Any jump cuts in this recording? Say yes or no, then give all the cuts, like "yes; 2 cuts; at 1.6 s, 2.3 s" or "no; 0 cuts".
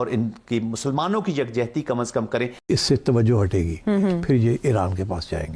yes; 1 cut; at 2.5 s